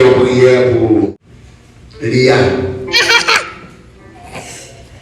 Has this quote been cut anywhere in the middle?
yes; 1 cut; at 1.2 s

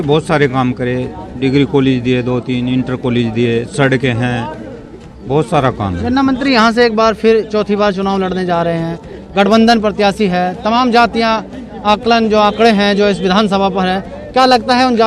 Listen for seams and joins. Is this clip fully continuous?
yes; 0 cuts

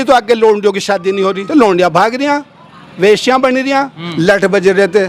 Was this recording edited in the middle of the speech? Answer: yes; 2 cuts; at 1.4 s, 4.0 s

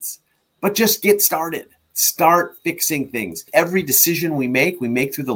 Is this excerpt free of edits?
no; 1 cut; at 3.4 s

